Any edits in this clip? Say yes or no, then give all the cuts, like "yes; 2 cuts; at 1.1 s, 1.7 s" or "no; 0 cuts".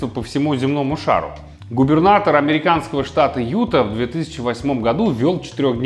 no; 0 cuts